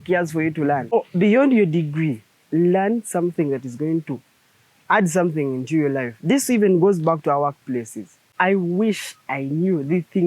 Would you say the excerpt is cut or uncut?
cut